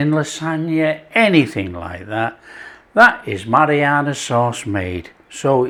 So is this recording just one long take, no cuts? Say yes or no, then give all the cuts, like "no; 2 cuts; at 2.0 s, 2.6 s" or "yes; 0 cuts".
yes; 0 cuts